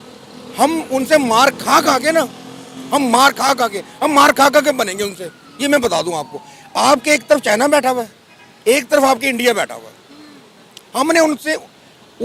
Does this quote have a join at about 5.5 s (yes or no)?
no